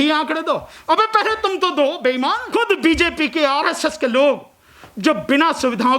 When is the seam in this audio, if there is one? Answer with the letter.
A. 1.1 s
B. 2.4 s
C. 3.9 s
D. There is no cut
B